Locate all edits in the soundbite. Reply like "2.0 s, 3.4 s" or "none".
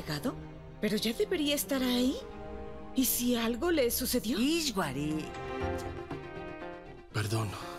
5.3 s